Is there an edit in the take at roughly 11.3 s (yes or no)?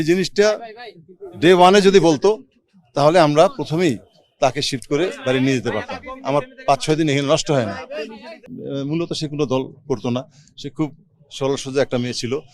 no